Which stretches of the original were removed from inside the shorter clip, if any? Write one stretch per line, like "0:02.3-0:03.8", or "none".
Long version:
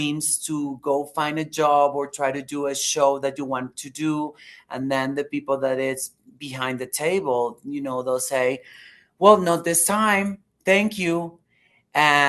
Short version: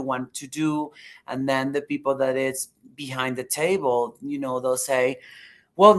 none

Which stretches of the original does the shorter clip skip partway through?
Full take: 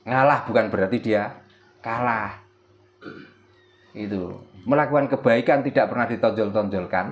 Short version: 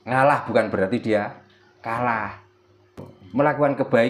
0:03.1-0:04.5

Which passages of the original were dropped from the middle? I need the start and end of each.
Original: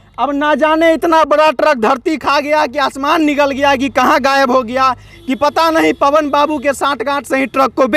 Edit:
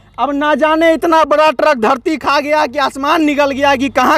none

